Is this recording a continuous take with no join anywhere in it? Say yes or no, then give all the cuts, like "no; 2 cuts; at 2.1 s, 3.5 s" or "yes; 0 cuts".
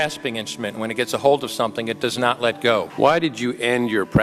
no; 1 cut; at 2.9 s